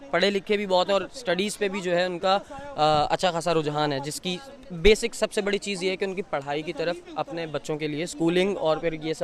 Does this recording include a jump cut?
no; 0 cuts

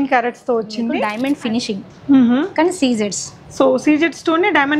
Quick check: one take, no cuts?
no; 1 cut; at 1.1 s

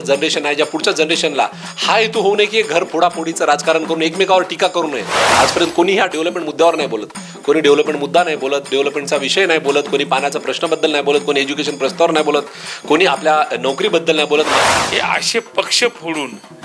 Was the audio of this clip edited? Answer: yes; 2 cuts; at 5.3 s, 14.5 s

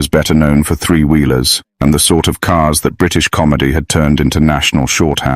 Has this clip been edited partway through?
no; 0 cuts

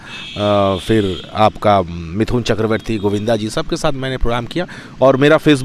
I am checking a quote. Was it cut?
no; 0 cuts

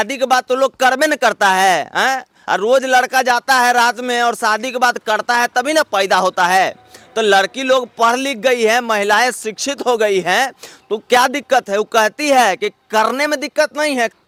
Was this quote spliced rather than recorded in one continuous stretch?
no; 0 cuts

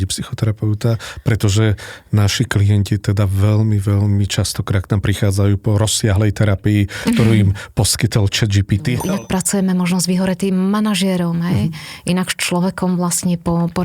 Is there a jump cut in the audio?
yes; 1 cut; at 9.0 s

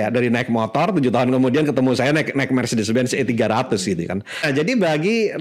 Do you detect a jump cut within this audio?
yes; 1 cut; at 4.4 s

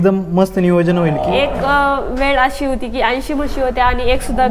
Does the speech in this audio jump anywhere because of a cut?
yes; 1 cut; at 1.2 s

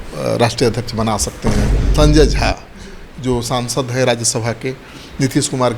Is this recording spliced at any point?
yes; 1 cut; at 1.8 s

